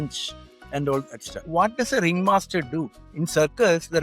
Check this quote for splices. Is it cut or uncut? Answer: cut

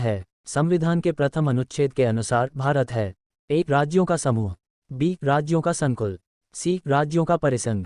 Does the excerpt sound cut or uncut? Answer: uncut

